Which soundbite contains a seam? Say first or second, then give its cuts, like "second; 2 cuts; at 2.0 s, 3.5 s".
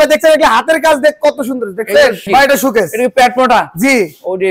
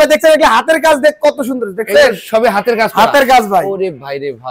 first; 1 cut; at 2.2 s